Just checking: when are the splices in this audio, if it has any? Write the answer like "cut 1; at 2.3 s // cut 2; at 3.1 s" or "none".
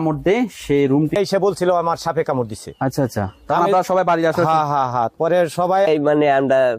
cut 1; at 1.1 s // cut 2; at 5.9 s